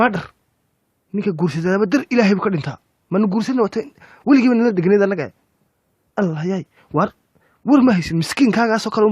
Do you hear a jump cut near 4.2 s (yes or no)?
no